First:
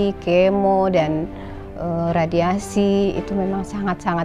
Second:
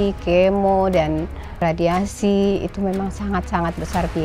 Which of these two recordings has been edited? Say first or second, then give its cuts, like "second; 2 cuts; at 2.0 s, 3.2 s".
second; 1 cut; at 1.6 s